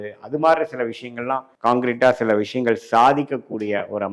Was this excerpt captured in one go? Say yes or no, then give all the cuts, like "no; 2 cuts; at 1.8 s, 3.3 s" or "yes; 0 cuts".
no; 1 cut; at 1.5 s